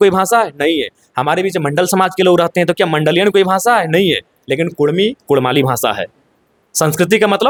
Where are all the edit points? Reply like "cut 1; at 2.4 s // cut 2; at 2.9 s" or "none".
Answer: none